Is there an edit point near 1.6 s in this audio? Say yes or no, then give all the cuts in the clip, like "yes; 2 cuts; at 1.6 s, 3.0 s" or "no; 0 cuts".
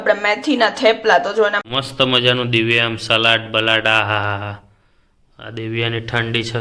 yes; 1 cut; at 1.6 s